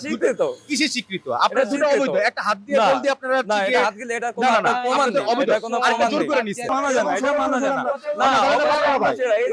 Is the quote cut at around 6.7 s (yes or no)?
yes